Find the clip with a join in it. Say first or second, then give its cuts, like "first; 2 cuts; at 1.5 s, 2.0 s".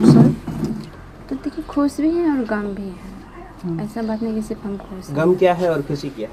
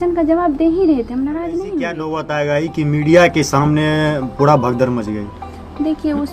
second; 1 cut; at 2.2 s